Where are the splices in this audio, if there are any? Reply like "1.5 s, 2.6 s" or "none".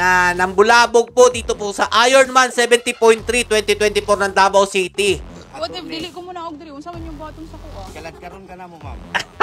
5.4 s